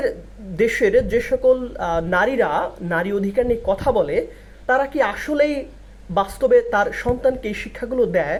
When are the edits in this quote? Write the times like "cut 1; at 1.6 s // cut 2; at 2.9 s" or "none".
none